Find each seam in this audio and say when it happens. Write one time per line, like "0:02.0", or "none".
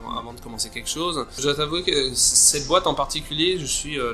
0:01.4